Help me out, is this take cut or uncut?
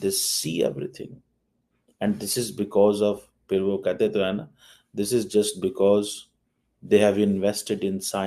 uncut